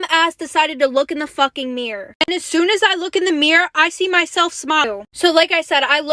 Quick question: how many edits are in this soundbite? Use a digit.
1